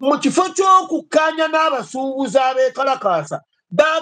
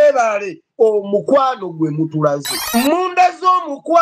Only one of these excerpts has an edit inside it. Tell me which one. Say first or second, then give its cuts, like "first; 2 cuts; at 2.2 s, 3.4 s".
second; 1 cut; at 2.5 s